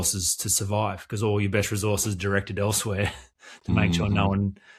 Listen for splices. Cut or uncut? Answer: uncut